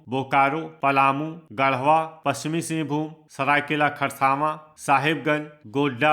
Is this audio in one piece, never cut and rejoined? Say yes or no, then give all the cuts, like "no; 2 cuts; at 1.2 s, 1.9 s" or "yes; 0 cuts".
no; 4 cuts; at 0.8 s, 2.1 s, 3.2 s, 4.7 s